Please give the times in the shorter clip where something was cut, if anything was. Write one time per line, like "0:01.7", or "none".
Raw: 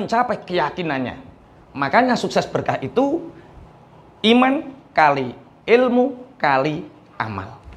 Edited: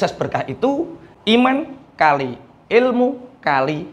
0:01.0